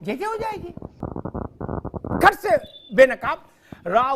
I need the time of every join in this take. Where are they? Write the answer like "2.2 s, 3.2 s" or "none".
1.0 s

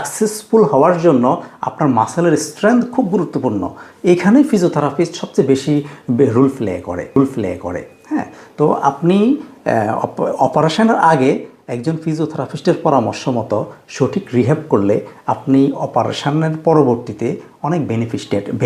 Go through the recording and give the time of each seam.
none

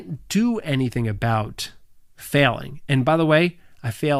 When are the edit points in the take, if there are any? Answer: none

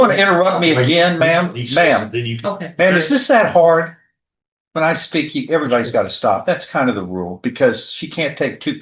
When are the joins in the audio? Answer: none

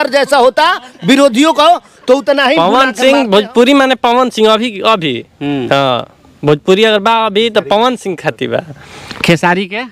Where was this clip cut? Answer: 2.6 s

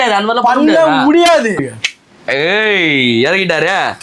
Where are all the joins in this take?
1.6 s

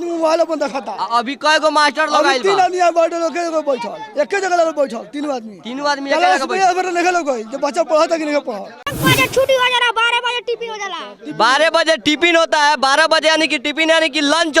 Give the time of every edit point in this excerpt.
none

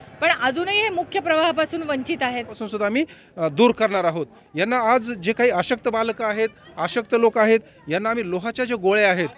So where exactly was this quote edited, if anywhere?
2.6 s

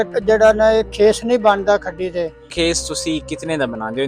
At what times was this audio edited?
2.6 s

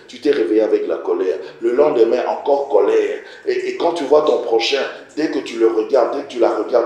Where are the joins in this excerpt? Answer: none

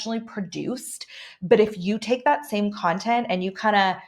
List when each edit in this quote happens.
none

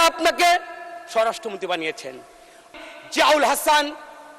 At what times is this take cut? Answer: 2.7 s

